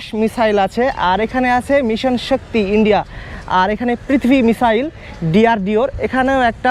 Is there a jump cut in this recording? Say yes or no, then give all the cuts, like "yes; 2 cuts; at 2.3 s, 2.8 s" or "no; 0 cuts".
no; 0 cuts